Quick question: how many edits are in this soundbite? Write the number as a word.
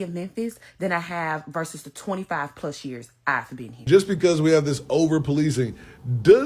one